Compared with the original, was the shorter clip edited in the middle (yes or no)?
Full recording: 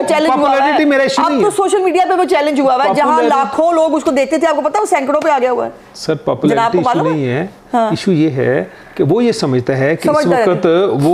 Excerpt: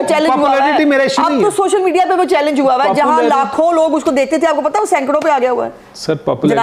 no